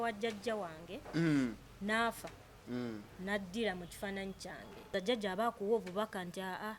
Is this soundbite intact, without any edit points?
no; 1 cut; at 4.9 s

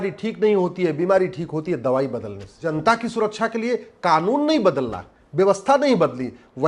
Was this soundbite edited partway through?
yes; 1 cut; at 2.6 s

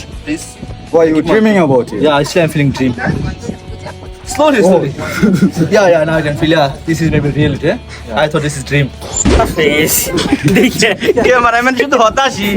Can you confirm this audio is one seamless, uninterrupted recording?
no; 1 cut; at 9.3 s

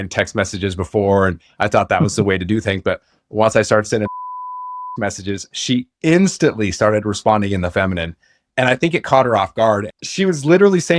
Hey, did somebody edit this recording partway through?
yes; 1 cut; at 9.9 s

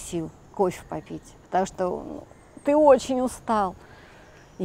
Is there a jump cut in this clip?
no; 0 cuts

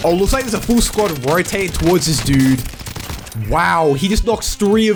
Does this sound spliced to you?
no; 0 cuts

